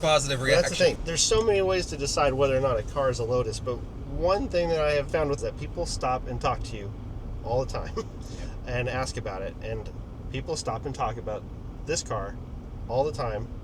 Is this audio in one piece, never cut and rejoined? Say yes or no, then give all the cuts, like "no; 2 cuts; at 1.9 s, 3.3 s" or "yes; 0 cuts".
no; 2 cuts; at 1.0 s, 5.3 s